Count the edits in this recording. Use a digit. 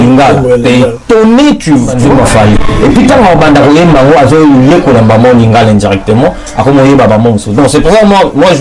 1